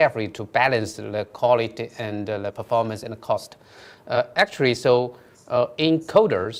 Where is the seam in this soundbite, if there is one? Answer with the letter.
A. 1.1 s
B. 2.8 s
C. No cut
C